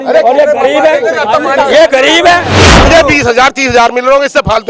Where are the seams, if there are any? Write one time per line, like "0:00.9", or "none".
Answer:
0:02.6